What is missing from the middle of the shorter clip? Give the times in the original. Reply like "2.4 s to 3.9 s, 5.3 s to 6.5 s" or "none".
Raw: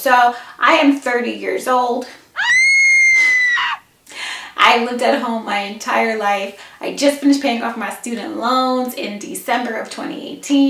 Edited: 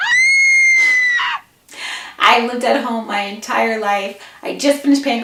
none